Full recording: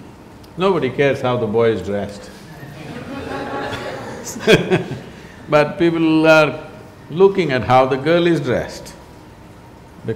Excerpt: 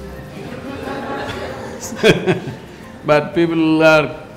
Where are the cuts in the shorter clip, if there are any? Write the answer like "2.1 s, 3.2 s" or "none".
none

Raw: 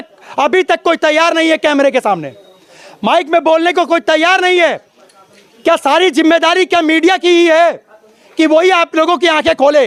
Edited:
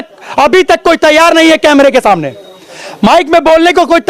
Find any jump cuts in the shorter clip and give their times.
none

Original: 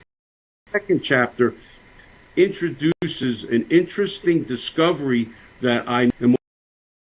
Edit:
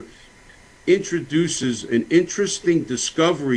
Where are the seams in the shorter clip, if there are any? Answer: 1.5 s

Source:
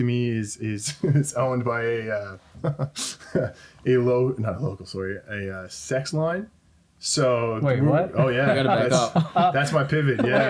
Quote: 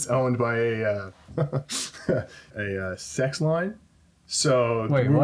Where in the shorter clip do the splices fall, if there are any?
2.5 s

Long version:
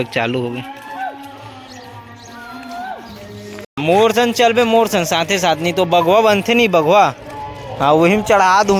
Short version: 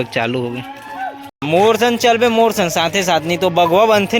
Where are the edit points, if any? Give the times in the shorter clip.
1.3 s

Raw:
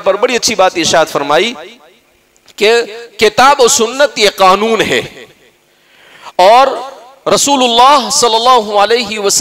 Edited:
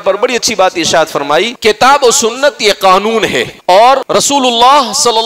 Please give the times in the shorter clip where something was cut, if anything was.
1.5 s, 3.5 s, 4.0 s

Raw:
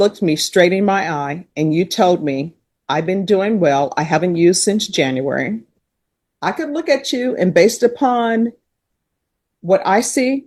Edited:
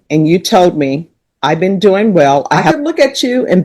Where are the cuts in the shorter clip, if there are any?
2.6 s

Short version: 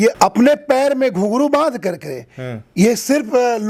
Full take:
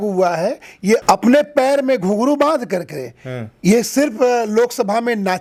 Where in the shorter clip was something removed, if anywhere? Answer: none

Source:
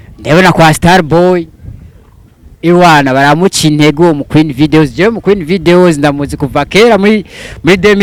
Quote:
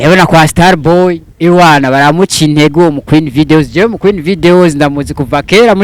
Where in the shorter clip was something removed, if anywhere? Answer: 1.3 s

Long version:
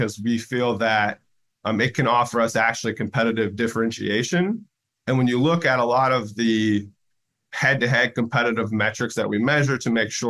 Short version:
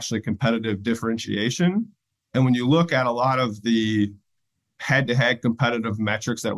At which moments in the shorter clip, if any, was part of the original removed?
none

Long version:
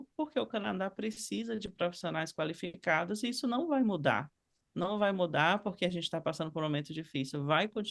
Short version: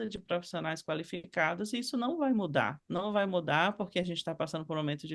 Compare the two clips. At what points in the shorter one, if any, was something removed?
2.8 s

